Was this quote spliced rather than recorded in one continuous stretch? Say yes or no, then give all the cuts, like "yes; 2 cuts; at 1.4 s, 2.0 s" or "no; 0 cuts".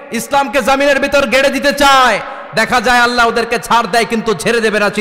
no; 0 cuts